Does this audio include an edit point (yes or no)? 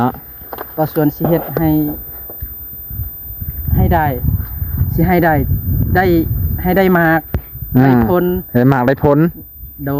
no